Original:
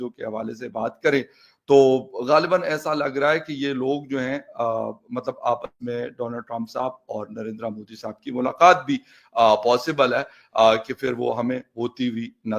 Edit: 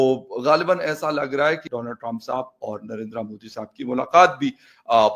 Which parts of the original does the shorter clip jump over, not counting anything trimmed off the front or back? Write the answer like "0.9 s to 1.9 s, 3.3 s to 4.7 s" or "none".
3.5 s to 6.1 s